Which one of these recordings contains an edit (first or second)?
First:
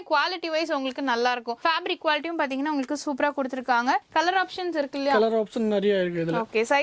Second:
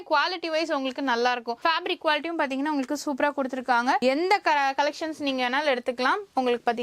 second